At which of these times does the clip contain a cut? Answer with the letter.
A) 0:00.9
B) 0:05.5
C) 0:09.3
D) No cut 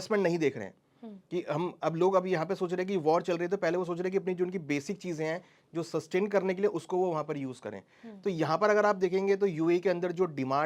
D